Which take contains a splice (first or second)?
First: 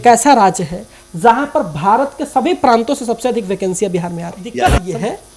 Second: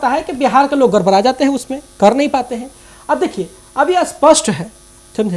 first